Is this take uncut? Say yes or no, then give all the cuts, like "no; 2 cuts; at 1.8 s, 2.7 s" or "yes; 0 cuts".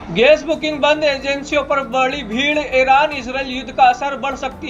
yes; 0 cuts